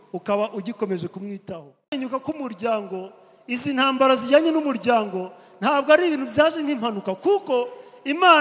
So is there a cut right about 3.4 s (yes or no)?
no